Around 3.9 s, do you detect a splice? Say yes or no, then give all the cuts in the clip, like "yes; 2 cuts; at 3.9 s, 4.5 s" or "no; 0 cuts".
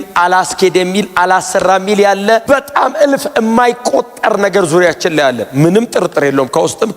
no; 1 cut; at 2.4 s